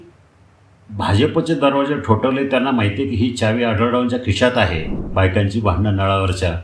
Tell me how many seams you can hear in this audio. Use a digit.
1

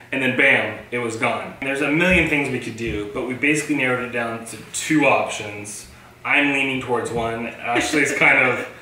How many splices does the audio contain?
1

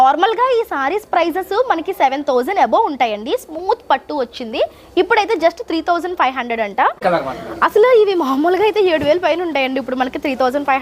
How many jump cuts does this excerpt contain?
1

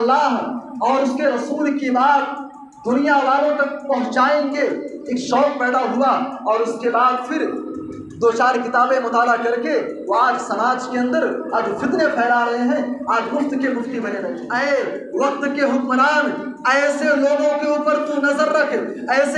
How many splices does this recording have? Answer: 1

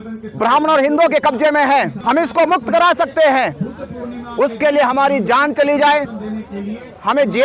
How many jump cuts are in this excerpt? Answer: 1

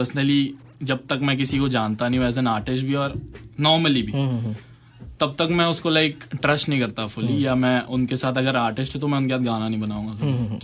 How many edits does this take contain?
0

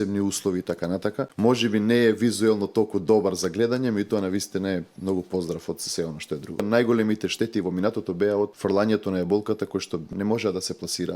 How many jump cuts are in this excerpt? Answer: 4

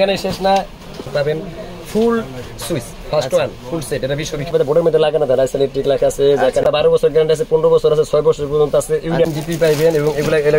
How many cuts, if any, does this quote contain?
4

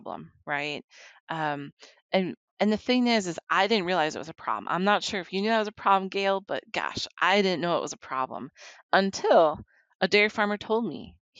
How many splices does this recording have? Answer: 0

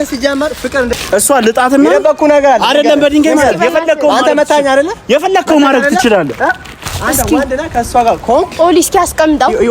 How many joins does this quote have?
1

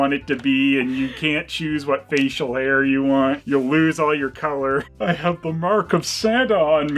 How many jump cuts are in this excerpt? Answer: 1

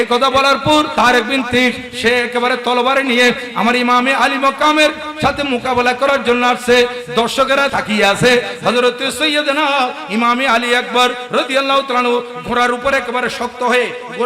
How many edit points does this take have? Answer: 2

